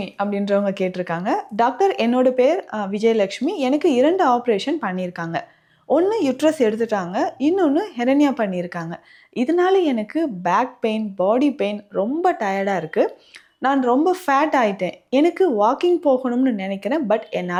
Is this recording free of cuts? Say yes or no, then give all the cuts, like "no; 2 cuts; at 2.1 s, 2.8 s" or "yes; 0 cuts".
yes; 0 cuts